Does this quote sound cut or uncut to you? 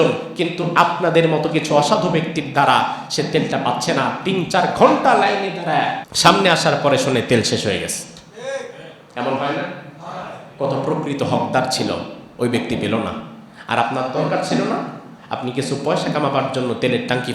cut